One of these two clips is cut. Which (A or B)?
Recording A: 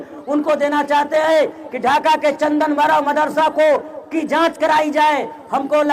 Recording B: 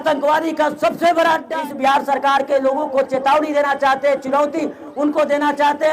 B